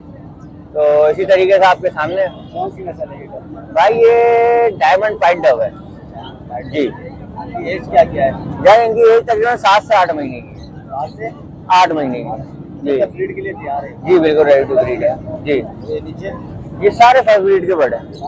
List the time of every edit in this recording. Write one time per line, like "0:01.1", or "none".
none